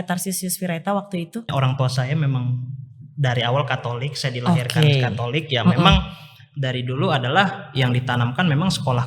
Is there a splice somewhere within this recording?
yes; 1 cut; at 1.5 s

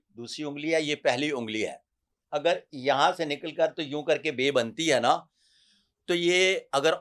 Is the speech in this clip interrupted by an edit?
no; 0 cuts

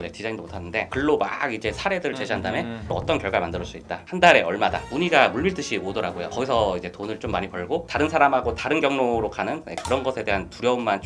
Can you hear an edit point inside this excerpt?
yes; 2 cuts; at 4.8 s, 7.9 s

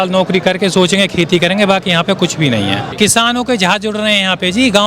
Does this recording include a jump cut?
yes; 1 cut; at 2.9 s

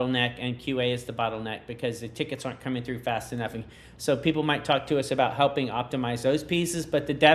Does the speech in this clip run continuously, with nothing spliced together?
yes; 0 cuts

